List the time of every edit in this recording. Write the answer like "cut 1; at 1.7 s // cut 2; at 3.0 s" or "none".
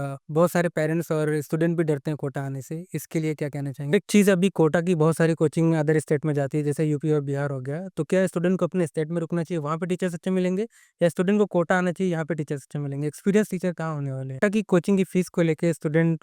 cut 1; at 3.9 s // cut 2; at 14.4 s